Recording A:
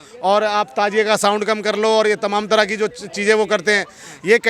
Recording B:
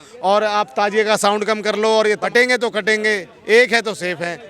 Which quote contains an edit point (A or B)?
B